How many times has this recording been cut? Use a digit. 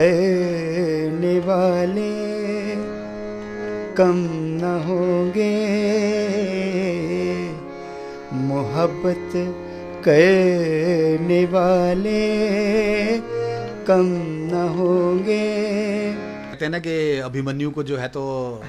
1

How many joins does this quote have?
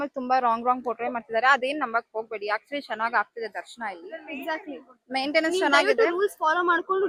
0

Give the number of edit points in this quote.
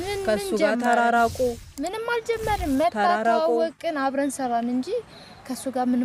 0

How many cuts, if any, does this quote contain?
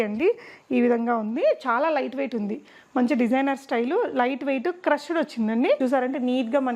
1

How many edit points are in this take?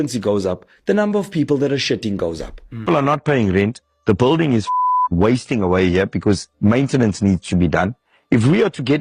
1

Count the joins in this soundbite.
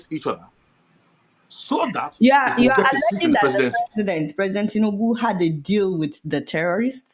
0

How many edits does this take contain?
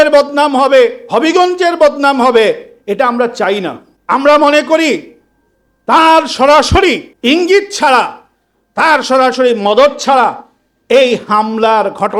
2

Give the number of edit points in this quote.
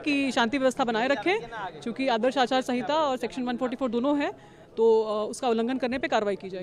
0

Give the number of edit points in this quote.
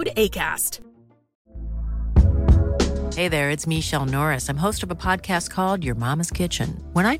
0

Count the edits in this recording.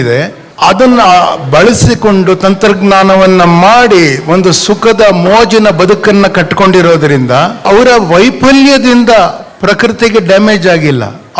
2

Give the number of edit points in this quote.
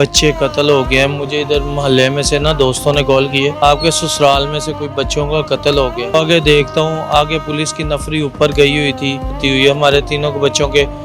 3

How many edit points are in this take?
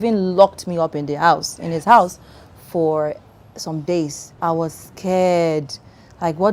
1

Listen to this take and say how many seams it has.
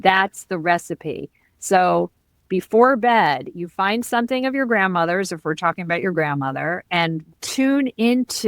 1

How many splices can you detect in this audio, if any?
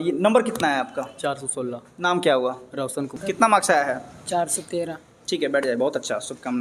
1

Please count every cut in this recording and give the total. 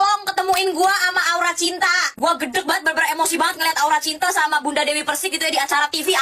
0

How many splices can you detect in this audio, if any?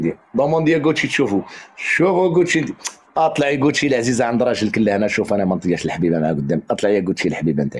0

